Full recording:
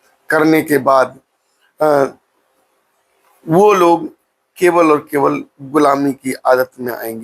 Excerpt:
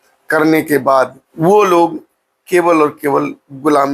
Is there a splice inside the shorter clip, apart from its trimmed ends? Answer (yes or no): yes